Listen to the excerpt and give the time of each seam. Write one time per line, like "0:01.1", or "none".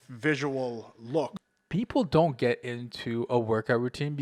0:01.3